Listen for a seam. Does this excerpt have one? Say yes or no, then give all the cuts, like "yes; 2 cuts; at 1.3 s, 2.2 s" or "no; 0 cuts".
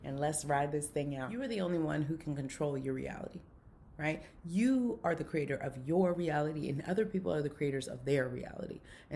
yes; 1 cut; at 1.3 s